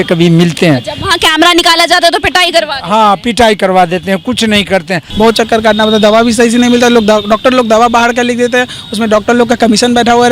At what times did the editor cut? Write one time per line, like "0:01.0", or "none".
0:05.0